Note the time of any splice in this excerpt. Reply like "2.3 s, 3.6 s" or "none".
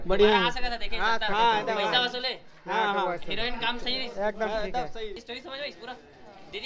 5.2 s